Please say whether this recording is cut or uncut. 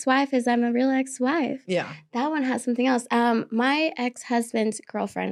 uncut